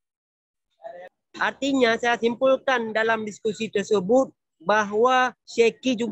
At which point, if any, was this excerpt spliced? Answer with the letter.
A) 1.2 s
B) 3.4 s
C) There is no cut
A